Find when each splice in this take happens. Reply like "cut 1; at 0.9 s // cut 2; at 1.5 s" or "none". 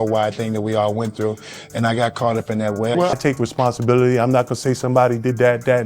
cut 1; at 3.2 s